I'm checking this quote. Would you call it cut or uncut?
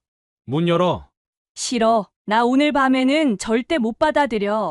uncut